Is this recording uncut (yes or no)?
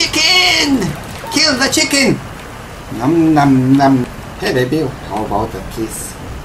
no